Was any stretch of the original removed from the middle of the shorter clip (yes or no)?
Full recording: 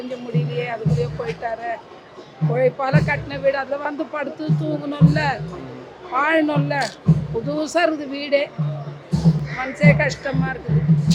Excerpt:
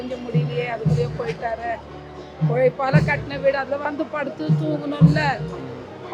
no